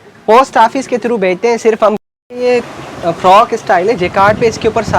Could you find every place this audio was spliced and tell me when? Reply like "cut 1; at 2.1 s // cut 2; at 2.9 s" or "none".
cut 1; at 2.0 s